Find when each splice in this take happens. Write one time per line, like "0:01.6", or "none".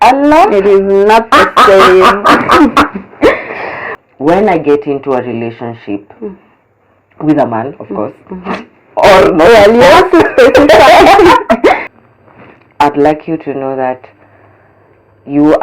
0:03.9
0:11.8